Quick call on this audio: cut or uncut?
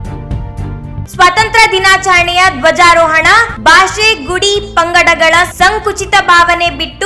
cut